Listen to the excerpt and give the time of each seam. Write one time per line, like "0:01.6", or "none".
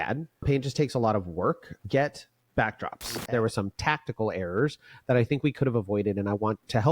0:03.2

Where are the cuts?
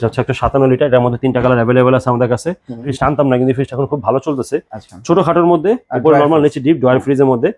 0:02.9

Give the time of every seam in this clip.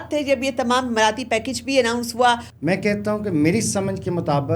0:02.5

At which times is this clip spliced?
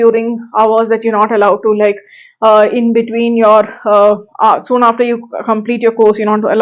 none

